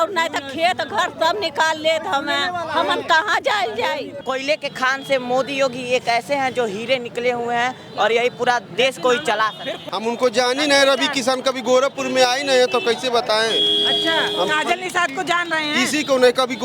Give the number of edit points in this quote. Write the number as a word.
two